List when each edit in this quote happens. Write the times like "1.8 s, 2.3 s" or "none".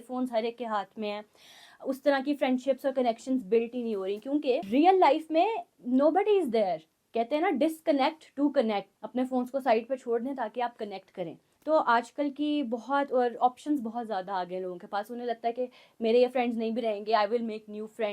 4.6 s, 6.9 s, 8.9 s, 11.5 s

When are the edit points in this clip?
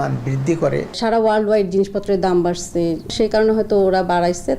1.0 s, 3.1 s

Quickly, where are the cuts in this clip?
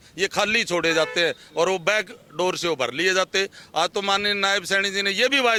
none

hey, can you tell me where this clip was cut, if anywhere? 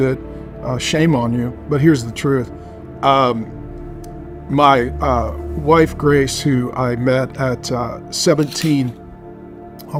none

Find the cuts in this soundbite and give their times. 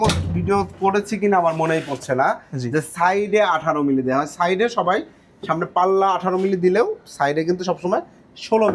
none

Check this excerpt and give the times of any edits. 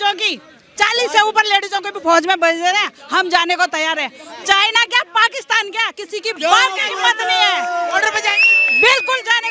none

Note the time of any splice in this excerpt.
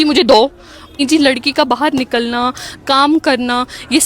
1.0 s

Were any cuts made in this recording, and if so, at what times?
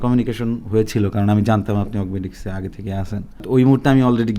3.4 s

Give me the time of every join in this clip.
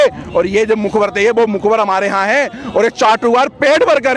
none

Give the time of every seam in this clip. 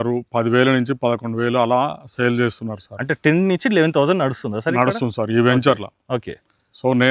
none

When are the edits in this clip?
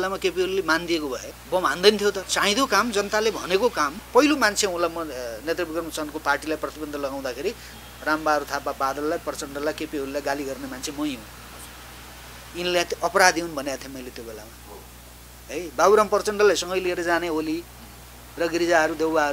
1.3 s, 2.3 s, 4.0 s

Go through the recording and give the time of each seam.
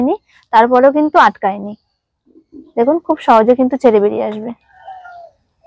4.7 s

